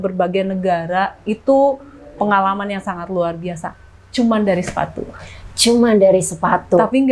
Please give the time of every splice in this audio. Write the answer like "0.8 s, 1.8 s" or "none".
none